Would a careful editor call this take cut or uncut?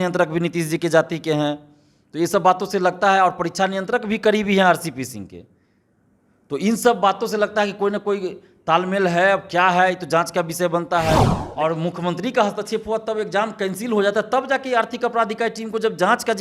cut